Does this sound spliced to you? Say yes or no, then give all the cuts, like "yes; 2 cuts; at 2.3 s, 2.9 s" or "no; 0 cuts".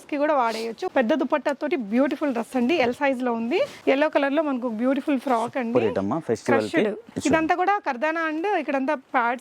yes; 2 cuts; at 0.8 s, 3.8 s